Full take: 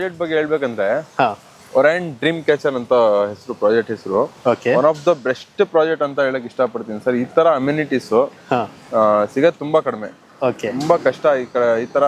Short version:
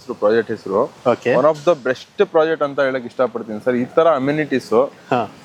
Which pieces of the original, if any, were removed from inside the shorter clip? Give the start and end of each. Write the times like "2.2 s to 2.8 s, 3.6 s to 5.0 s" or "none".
none